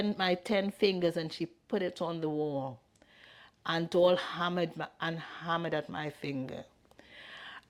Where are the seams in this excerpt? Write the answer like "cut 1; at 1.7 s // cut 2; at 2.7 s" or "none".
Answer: none